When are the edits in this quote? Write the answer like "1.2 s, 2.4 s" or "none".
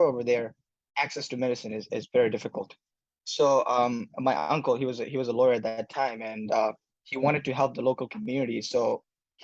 none